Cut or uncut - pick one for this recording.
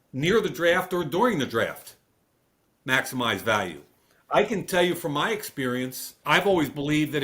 cut